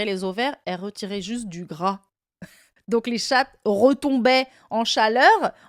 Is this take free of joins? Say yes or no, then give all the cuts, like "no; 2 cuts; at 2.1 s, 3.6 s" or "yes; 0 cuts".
yes; 0 cuts